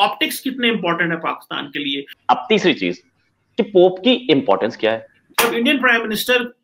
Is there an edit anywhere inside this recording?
yes; 2 cuts; at 2.1 s, 5.2 s

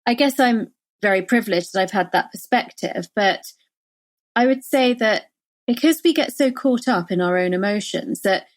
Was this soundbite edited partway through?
yes; 1 cut; at 1.0 s

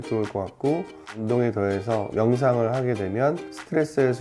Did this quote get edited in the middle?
yes; 1 cut; at 2.1 s

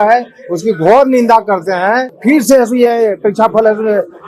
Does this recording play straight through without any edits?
no; 1 cut; at 2.1 s

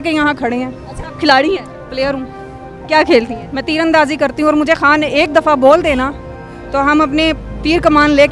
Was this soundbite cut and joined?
no; 0 cuts

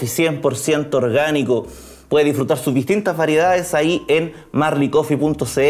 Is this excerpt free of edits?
yes; 0 cuts

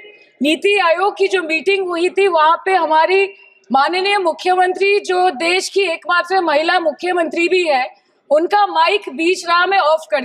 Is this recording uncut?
yes; 0 cuts

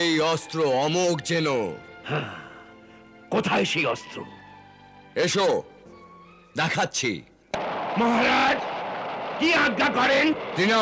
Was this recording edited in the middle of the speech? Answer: yes; 1 cut; at 7.5 s

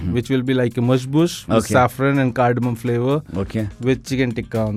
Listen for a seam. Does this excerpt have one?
no; 0 cuts

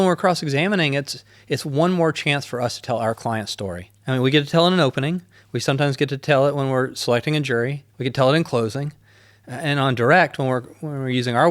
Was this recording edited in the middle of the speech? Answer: yes; 2 cuts; at 3.9 s, 7.9 s

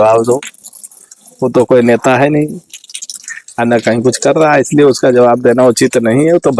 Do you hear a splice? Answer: no; 0 cuts

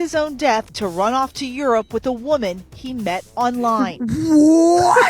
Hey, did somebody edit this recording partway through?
yes; 1 cut; at 4.0 s

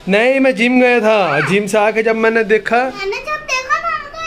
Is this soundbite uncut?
no; 1 cut; at 3.1 s

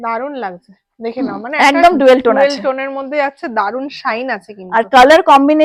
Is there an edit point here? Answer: no; 0 cuts

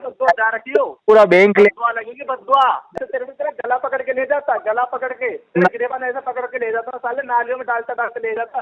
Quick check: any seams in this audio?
yes; 1 cut; at 2.9 s

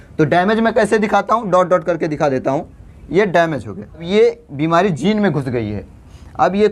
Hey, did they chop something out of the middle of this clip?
yes; 1 cut; at 4.0 s

